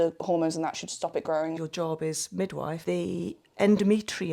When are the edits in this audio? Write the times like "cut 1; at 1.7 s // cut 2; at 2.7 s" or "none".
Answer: cut 1; at 1.6 s // cut 2; at 2.8 s